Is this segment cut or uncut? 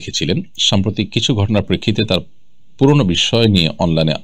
uncut